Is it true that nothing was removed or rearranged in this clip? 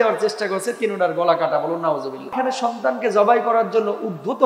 no; 1 cut; at 2.3 s

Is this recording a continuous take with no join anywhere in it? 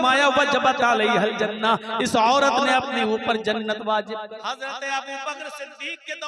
no; 1 cut; at 4.3 s

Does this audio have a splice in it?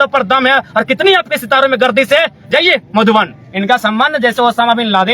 yes; 1 cut; at 3.4 s

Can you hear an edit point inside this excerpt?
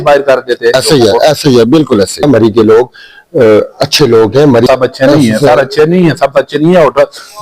yes; 2 cuts; at 2.2 s, 4.7 s

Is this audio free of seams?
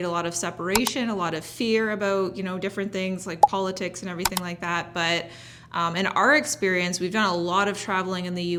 yes; 0 cuts

